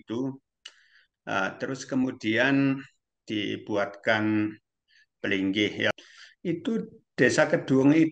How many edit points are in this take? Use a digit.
1